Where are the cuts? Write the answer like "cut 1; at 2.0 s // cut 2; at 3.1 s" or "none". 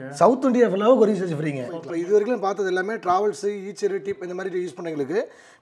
cut 1; at 1.8 s